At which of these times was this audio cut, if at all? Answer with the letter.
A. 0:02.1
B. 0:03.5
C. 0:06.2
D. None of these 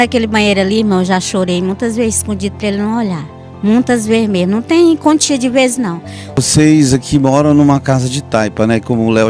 C